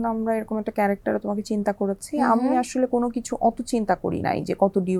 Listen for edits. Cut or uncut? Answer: uncut